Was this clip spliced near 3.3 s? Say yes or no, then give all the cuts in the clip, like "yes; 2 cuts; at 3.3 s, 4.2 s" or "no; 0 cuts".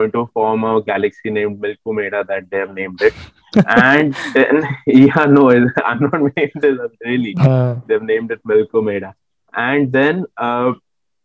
no; 0 cuts